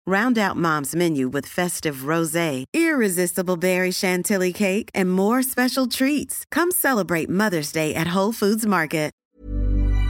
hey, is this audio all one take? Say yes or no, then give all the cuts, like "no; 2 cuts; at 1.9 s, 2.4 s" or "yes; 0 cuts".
no; 1 cut; at 9.2 s